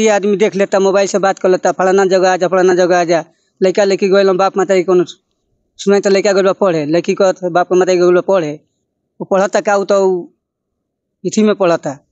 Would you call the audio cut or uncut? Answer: uncut